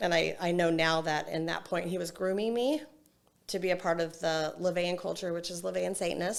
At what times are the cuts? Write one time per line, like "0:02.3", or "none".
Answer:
none